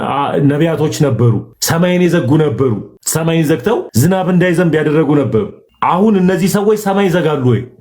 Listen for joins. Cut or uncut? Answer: cut